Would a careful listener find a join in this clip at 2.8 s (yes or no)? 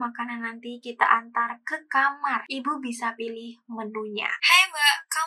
no